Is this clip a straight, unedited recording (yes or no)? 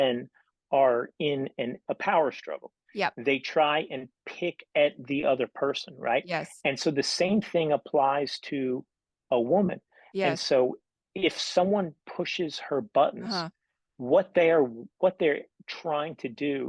no